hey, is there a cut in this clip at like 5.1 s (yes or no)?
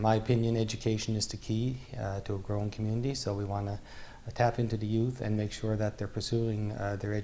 no